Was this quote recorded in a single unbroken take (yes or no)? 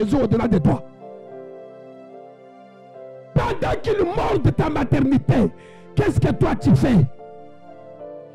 yes